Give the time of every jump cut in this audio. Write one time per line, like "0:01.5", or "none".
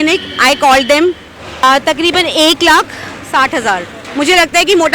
0:01.6
0:04.0